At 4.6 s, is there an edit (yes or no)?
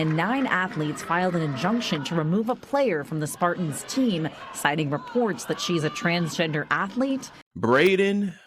no